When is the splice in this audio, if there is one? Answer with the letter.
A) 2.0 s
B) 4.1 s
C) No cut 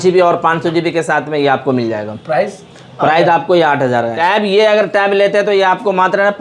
B